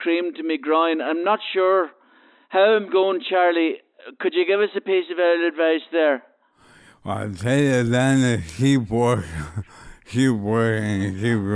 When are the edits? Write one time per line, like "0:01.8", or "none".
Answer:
none